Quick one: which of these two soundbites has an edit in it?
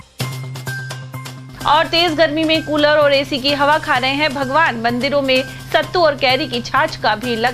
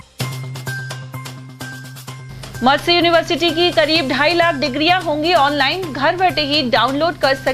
second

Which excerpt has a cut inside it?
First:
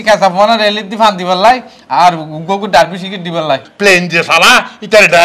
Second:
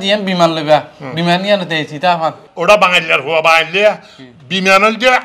first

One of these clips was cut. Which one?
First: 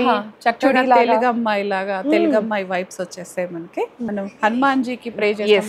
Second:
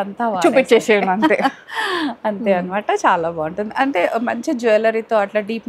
first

